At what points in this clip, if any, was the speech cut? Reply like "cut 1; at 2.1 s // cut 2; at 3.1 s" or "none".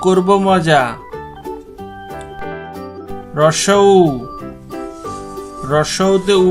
cut 1; at 1.5 s // cut 2; at 3.3 s // cut 3; at 4.2 s // cut 4; at 5.6 s